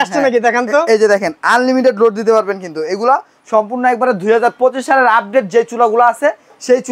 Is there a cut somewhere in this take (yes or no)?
no